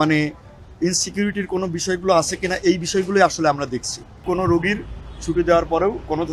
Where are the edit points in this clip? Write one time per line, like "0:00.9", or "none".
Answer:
0:04.2